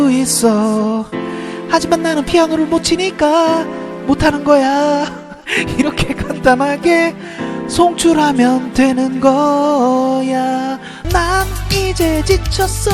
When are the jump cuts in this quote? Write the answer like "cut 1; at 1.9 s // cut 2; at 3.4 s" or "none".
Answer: cut 1; at 10.9 s